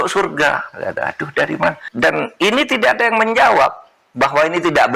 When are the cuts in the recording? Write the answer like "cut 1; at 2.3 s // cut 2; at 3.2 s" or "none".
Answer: cut 1; at 1.9 s